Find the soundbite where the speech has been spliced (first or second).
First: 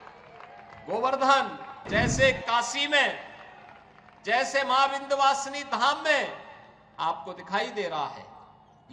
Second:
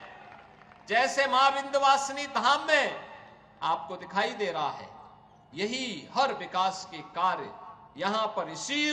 first